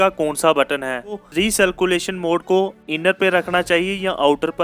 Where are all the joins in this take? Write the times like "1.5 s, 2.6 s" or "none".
1.2 s